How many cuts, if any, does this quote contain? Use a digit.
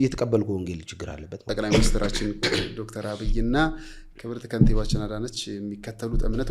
1